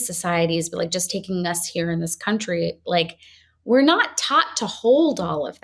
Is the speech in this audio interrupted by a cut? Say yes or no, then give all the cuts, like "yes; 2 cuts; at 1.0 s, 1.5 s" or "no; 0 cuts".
no; 0 cuts